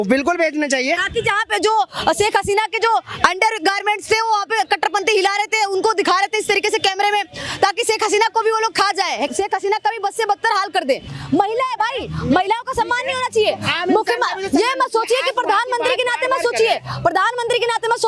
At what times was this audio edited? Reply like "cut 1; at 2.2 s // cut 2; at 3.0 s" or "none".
cut 1; at 9.3 s // cut 2; at 11.1 s